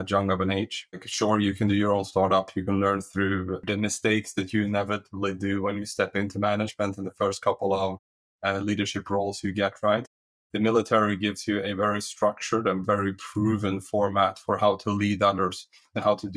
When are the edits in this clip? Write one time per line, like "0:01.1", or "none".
0:01.1
0:03.6